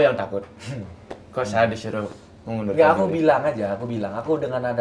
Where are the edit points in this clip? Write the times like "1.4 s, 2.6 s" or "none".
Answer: none